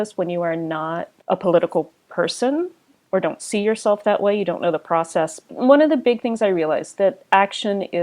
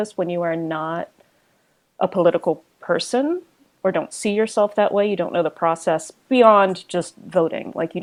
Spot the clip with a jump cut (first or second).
first